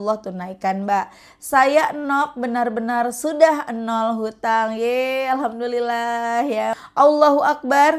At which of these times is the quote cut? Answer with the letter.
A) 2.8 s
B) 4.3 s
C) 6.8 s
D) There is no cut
C